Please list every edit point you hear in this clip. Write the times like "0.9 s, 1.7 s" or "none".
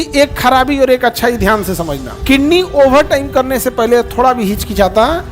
2.0 s